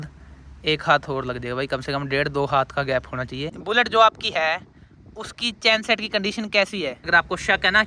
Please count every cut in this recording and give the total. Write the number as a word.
two